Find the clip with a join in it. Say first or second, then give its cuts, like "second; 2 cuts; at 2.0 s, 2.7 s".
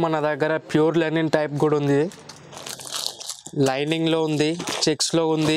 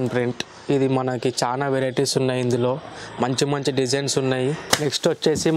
second; 1 cut; at 4.6 s